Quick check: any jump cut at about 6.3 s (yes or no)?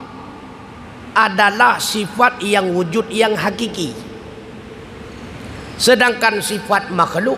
no